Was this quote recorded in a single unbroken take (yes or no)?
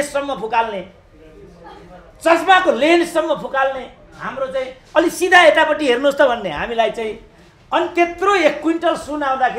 yes